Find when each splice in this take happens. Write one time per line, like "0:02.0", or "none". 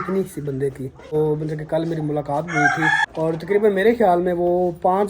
0:01.1
0:03.0